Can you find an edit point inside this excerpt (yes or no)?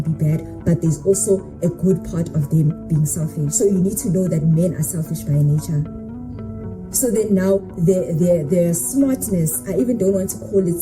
no